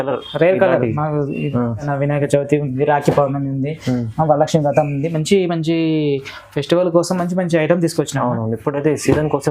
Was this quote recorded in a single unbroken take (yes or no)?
no